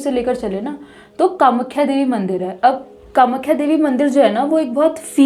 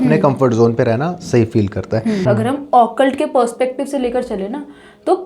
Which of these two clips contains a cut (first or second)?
second